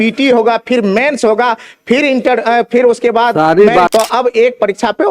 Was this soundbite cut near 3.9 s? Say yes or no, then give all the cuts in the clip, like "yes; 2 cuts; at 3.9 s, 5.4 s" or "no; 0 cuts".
yes; 1 cut; at 3.9 s